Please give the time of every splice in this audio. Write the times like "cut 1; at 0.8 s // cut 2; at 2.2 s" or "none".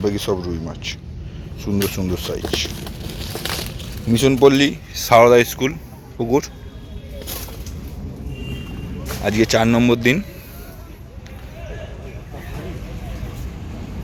none